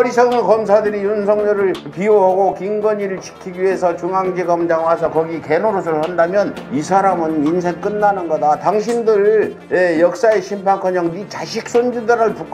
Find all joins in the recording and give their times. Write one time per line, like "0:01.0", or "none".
none